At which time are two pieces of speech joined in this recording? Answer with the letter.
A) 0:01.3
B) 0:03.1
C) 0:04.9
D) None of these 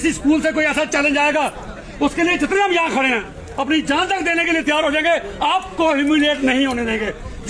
D